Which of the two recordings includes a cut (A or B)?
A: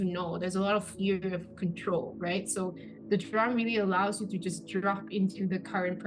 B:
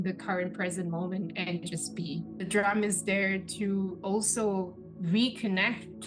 B